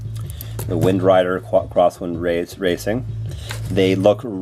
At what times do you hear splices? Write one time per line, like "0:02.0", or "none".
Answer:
none